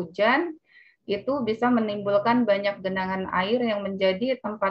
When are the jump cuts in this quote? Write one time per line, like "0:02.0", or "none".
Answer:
none